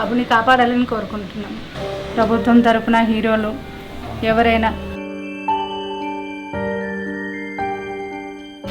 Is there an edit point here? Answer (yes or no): yes